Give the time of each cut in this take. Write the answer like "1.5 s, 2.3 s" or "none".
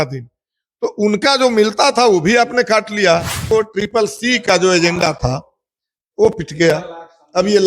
3.4 s